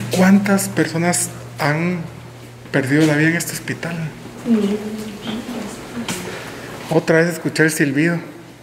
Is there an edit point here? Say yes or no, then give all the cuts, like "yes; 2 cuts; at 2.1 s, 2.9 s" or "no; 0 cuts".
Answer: no; 0 cuts